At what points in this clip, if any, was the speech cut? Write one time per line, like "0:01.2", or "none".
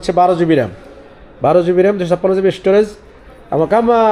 none

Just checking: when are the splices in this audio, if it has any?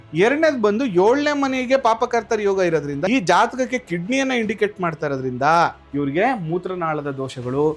0:03.1
0:05.8

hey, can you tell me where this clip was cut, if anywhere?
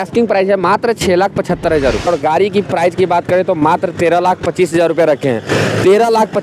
0:02.1

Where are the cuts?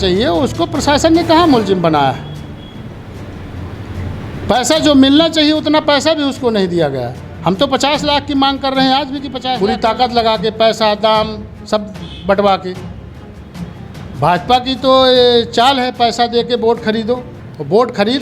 0:09.4

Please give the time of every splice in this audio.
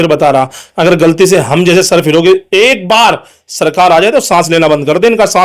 none

